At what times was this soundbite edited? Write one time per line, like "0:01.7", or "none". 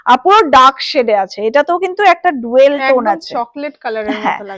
none